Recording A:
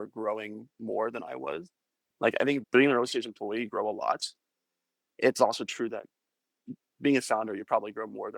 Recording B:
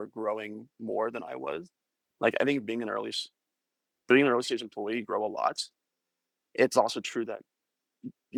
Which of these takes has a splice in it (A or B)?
A